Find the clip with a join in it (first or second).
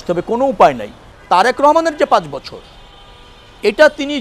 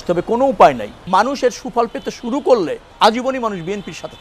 second